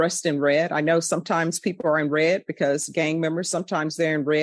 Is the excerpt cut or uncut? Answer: uncut